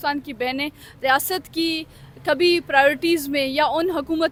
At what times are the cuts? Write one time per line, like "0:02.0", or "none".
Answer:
none